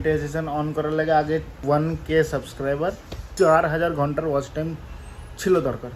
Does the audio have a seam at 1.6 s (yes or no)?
yes